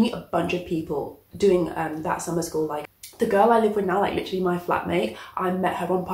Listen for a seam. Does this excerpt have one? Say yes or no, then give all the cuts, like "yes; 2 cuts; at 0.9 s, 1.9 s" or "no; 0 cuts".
no; 0 cuts